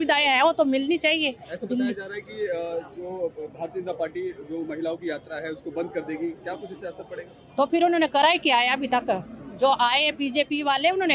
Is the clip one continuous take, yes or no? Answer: yes